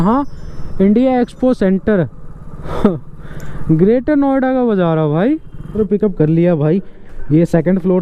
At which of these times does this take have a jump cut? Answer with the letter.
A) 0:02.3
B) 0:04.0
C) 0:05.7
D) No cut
C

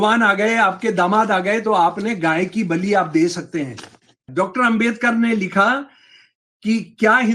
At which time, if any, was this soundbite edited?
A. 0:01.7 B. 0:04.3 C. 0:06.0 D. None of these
B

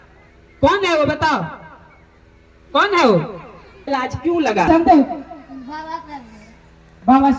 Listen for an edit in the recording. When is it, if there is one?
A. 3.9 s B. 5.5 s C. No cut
A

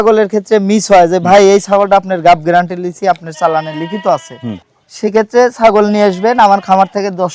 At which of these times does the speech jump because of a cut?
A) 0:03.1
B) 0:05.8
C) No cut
C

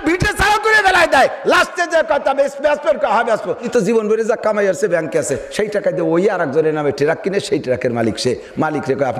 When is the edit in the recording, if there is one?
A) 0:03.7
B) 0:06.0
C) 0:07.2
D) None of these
A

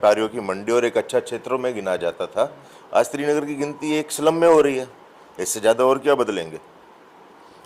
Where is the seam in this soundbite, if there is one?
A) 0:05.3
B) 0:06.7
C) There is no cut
C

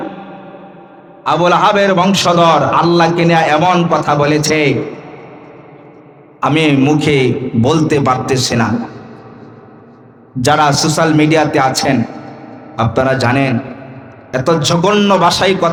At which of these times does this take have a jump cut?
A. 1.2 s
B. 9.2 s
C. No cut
C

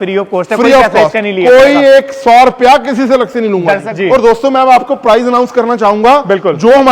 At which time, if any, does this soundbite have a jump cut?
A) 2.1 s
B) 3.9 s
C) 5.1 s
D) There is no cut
B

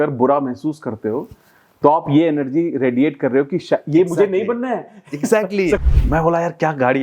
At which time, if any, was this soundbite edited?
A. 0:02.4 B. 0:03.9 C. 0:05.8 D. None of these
C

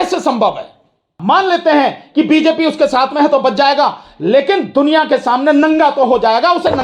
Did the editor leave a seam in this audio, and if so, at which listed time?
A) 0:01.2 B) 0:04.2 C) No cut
A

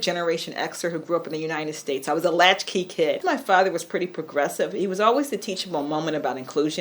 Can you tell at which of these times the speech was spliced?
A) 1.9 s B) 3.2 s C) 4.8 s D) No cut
B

